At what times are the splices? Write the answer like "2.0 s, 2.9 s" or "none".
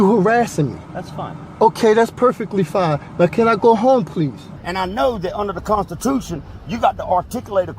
4.5 s